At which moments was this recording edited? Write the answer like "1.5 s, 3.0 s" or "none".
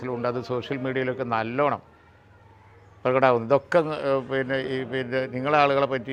none